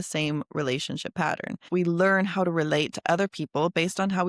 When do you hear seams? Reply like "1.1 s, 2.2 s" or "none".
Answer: 1.7 s